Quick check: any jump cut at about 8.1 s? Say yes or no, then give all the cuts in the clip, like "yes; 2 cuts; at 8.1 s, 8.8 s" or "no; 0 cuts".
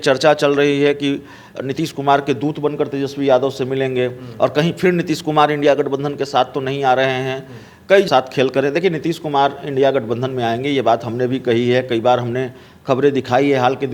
yes; 1 cut; at 8.1 s